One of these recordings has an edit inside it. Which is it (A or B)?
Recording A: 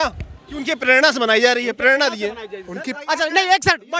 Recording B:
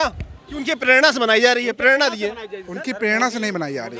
A